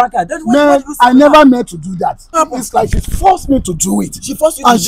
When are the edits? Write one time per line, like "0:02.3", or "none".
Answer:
0:02.3